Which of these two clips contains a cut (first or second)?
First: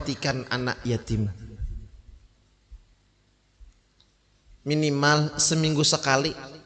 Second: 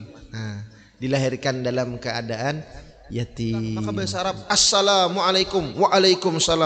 second